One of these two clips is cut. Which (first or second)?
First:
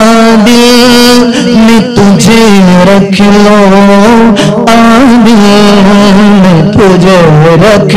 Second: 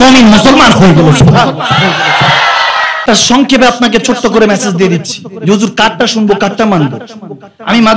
second